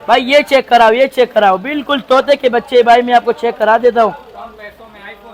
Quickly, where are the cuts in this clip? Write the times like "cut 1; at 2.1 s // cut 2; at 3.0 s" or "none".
none